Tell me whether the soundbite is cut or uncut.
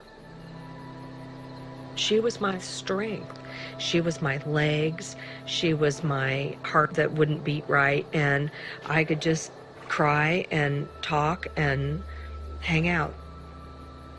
uncut